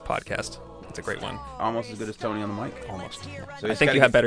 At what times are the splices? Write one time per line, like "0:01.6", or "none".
0:01.0
0:03.2